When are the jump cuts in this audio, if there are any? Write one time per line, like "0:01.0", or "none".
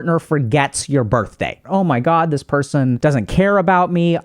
0:01.6
0:03.0